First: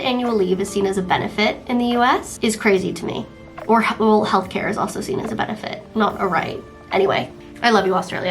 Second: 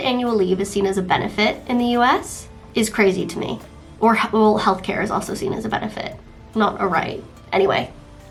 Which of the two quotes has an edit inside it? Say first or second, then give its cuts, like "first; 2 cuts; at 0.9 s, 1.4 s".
first; 3 cuts; at 2.3 s, 5.8 s, 7.4 s